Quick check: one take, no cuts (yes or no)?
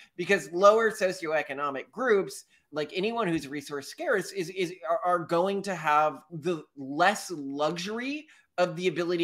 yes